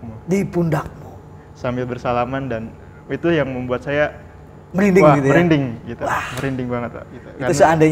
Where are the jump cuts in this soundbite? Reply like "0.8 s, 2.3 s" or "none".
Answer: none

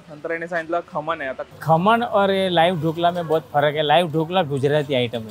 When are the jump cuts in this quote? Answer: 1.5 s

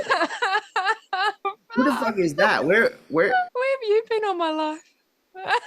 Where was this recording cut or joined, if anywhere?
3.5 s

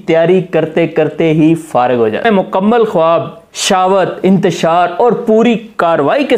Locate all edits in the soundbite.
2.2 s

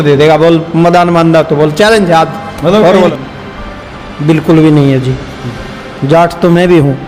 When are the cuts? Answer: 3.1 s

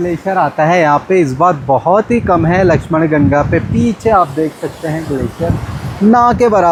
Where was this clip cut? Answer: none

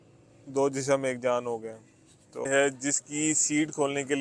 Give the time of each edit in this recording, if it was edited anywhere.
2.5 s

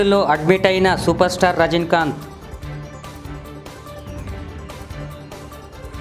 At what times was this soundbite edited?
none

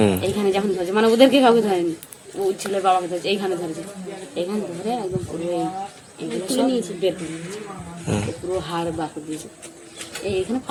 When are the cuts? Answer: none

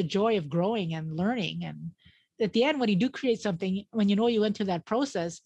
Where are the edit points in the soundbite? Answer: 2.3 s

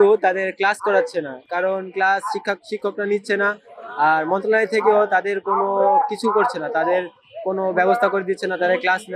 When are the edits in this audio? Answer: none

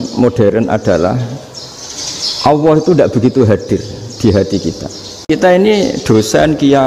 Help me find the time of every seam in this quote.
5.2 s

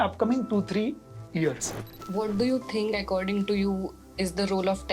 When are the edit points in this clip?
1.9 s

